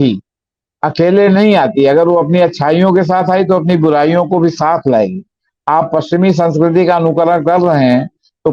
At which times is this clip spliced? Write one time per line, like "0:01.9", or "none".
none